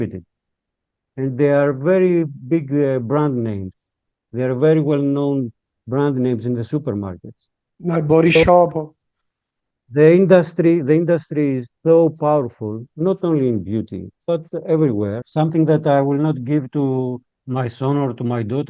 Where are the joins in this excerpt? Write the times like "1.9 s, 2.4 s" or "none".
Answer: 15.2 s